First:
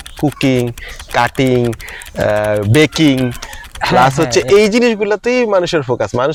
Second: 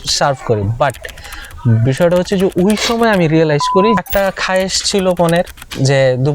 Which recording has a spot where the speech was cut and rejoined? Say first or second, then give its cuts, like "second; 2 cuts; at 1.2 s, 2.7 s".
second; 1 cut; at 4.0 s